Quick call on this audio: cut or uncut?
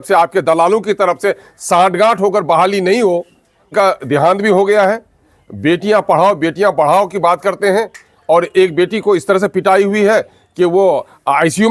cut